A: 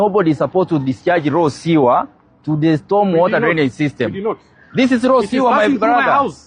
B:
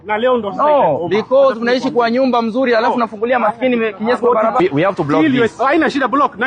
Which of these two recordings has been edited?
B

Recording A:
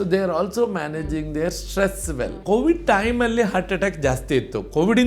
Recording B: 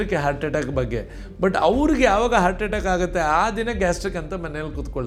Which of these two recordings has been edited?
A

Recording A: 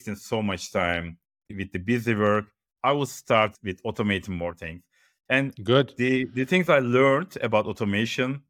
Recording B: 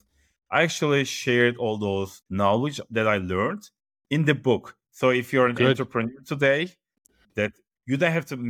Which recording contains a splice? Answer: A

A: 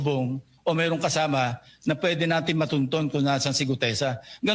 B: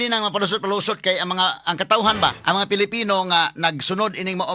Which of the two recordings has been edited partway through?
B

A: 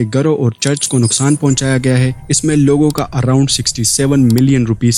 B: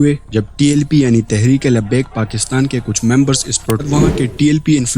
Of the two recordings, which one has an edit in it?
B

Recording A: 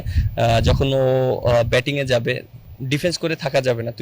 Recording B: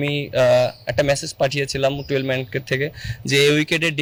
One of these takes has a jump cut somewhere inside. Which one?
A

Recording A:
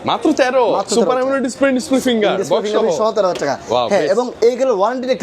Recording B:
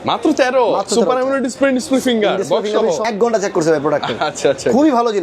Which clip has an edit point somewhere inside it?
B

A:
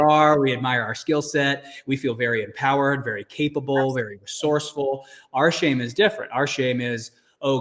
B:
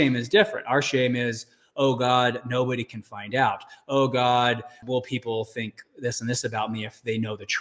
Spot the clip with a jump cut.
B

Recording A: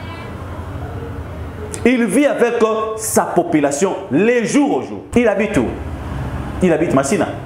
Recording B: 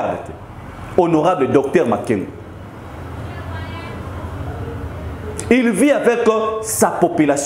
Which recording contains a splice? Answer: A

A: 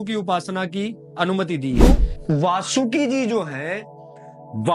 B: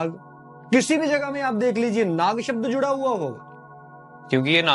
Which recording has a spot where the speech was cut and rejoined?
A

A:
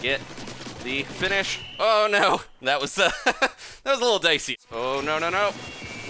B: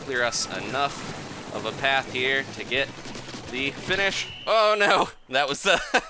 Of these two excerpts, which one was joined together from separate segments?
A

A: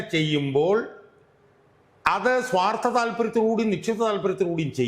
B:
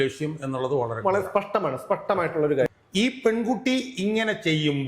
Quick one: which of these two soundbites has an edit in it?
B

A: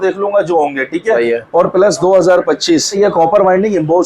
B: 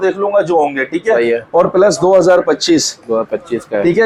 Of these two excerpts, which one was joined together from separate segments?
A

